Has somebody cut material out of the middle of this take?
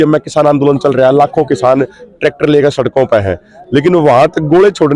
no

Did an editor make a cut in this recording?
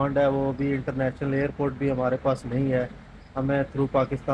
no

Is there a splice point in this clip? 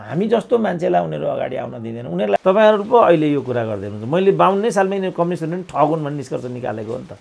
yes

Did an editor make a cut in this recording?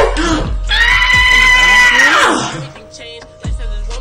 no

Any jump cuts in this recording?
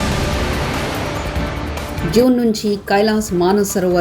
yes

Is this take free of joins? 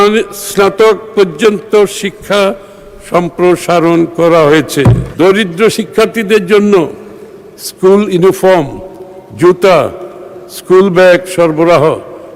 no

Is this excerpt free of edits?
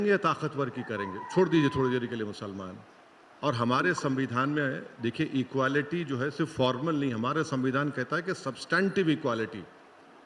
yes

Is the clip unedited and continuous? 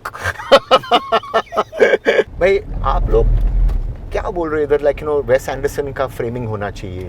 no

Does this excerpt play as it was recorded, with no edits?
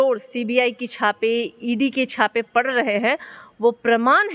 yes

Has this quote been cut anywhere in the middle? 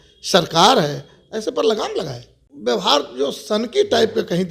yes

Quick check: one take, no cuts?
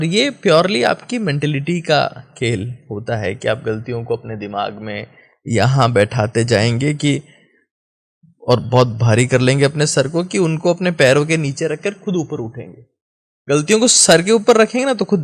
yes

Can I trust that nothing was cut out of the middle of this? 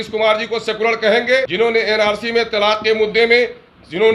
no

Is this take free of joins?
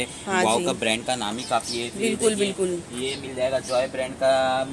yes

